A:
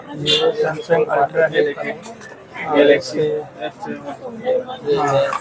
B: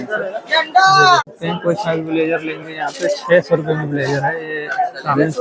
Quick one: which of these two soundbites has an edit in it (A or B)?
B